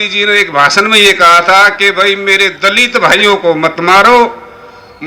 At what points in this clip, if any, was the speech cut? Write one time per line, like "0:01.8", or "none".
none